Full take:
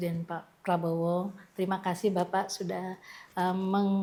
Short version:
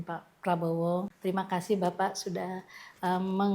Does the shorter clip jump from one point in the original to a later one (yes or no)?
yes